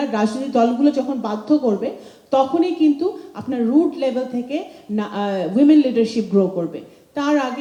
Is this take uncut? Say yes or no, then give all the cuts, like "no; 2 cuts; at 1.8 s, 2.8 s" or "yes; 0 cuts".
yes; 0 cuts